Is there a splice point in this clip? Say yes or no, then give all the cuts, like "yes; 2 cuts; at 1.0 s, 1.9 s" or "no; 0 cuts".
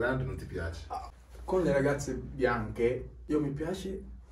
yes; 2 cuts; at 1.1 s, 3.1 s